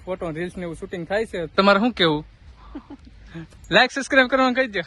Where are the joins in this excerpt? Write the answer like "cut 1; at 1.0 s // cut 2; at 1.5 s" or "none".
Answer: cut 1; at 1.5 s